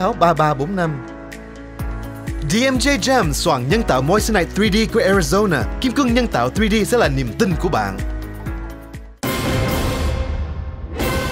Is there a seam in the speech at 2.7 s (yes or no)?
no